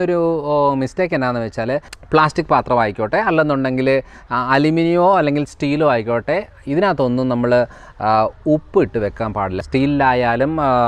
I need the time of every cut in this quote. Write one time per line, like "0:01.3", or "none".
0:01.9
0:09.6